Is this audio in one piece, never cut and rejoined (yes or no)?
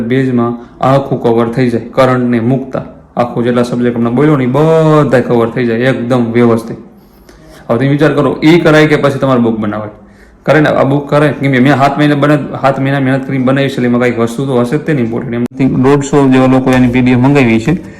no